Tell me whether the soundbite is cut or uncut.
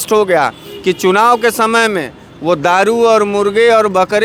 uncut